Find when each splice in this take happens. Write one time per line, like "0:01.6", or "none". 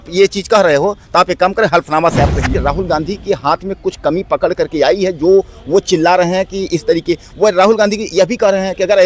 0:02.5